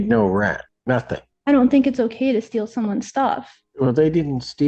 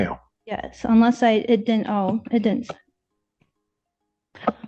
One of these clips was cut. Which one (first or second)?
first